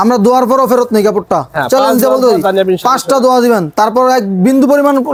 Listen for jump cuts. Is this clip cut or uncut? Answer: uncut